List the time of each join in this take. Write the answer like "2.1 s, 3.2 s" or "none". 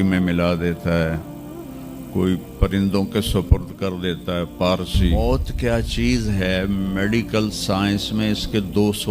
5.1 s